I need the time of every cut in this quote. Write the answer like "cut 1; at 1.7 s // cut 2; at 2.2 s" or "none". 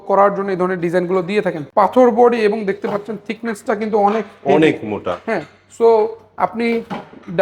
cut 1; at 1.6 s